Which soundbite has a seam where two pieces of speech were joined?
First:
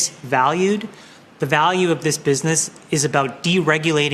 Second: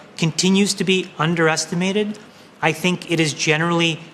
first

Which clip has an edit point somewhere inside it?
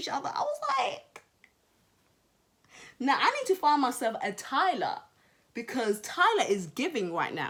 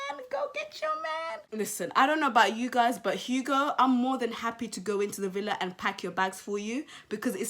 second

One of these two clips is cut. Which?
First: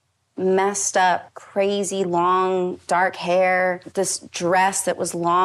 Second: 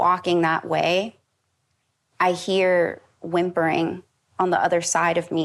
first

